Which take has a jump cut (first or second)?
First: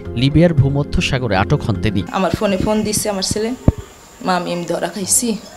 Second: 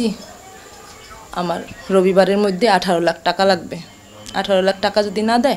first